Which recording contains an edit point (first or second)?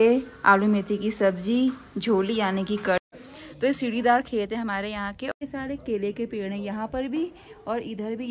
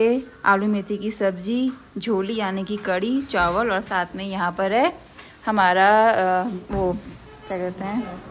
first